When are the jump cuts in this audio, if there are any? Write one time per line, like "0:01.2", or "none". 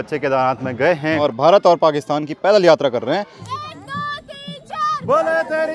0:01.2
0:03.5